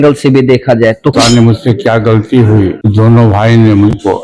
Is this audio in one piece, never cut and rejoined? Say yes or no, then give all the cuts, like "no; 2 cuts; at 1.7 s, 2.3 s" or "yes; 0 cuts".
no; 1 cut; at 1.2 s